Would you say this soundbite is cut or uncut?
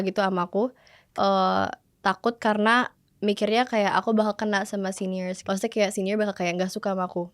cut